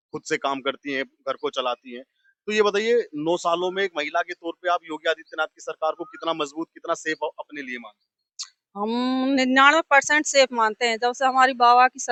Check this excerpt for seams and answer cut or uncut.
uncut